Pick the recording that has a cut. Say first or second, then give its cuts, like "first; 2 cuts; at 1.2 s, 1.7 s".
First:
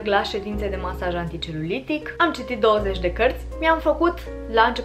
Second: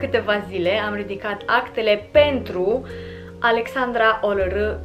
first; 2 cuts; at 2.2 s, 3.5 s